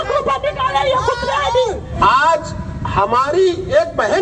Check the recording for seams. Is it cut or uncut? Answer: cut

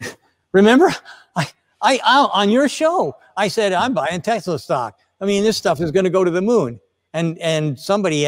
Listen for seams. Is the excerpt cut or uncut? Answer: cut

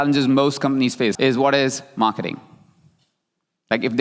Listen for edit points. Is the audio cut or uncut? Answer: cut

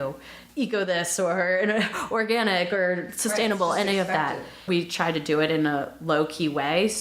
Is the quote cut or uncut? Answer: cut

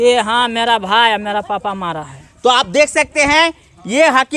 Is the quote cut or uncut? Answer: uncut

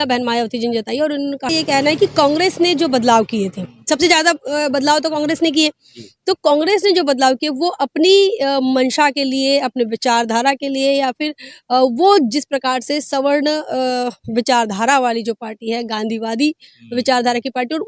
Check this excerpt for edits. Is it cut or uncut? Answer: cut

